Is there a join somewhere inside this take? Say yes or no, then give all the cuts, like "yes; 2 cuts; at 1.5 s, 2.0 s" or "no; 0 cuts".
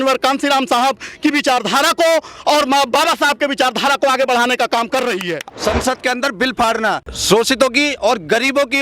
yes; 2 cuts; at 5.3 s, 7.1 s